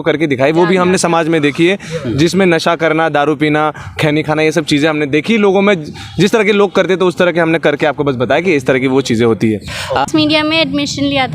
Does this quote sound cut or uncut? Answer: cut